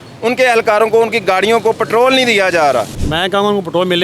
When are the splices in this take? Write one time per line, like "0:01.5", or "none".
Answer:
0:03.0